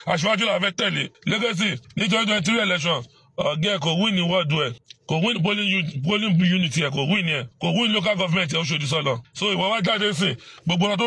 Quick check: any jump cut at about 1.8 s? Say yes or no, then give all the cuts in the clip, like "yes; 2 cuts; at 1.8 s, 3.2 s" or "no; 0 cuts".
yes; 5 cuts; at 1.1 s, 1.8 s, 4.9 s, 7.5 s, 9.3 s